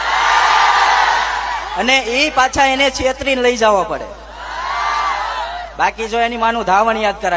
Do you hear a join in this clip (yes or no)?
no